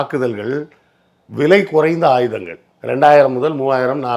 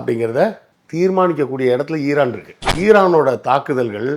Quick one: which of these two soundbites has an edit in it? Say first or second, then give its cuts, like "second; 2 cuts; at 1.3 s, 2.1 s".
second; 1 cut; at 2.6 s